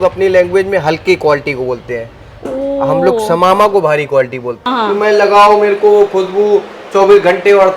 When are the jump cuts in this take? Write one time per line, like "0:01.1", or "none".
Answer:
0:04.6